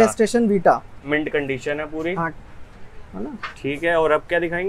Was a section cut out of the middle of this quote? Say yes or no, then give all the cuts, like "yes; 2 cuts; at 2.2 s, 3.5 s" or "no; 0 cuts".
no; 0 cuts